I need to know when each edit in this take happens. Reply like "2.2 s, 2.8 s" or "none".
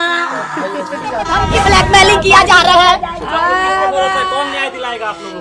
1.4 s